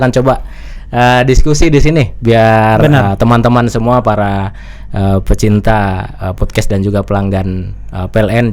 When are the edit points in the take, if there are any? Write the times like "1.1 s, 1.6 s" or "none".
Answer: none